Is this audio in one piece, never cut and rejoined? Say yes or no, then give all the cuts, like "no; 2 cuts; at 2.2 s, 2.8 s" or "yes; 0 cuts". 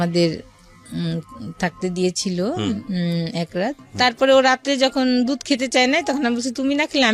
no; 1 cut; at 3.8 s